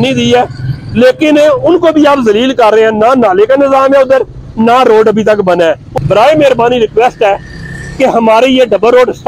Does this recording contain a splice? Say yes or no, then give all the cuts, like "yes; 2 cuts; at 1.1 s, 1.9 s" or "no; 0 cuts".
yes; 1 cut; at 5.9 s